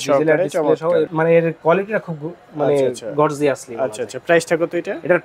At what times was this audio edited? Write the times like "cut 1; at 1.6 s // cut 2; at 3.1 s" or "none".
none

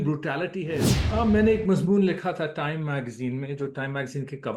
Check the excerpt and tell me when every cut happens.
cut 1; at 1.0 s

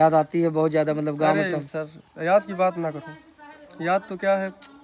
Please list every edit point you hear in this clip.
none

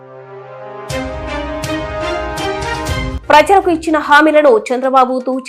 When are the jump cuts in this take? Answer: cut 1; at 3.1 s

